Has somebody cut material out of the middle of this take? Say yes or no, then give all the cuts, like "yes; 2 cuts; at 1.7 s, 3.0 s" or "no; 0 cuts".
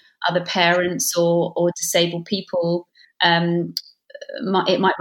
no; 0 cuts